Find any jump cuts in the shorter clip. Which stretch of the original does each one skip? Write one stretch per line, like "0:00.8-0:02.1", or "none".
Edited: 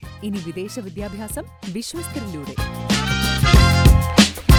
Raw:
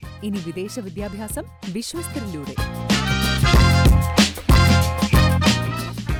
none